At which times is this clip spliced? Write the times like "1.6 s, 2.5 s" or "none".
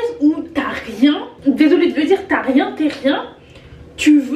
1.3 s